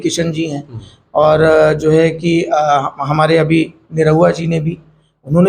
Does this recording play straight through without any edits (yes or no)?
yes